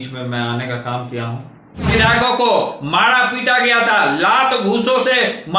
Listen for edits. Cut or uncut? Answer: cut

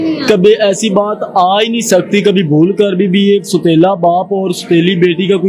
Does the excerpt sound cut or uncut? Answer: uncut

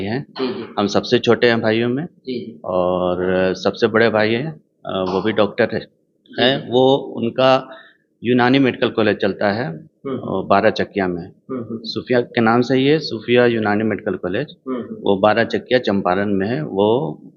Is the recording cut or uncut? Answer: uncut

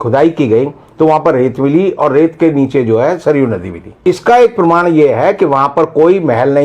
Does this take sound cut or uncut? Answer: cut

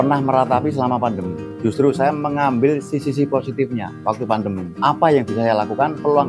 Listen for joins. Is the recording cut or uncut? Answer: uncut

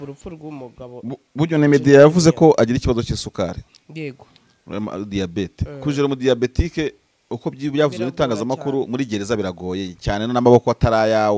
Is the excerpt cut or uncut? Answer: uncut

